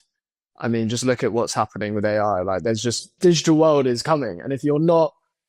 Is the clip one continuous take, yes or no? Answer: no